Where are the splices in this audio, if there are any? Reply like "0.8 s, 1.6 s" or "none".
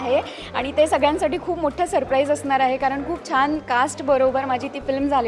none